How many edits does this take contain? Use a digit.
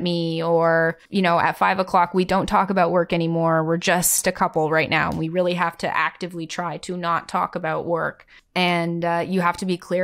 1